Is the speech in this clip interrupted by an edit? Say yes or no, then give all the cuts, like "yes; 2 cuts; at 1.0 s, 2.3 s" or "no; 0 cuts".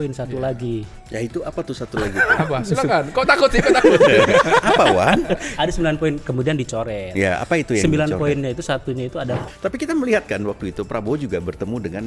yes; 2 cuts; at 5.4 s, 9.4 s